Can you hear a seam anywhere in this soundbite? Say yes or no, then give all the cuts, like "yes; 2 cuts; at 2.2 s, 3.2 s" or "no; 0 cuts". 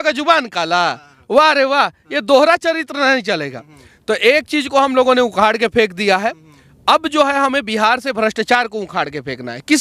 no; 0 cuts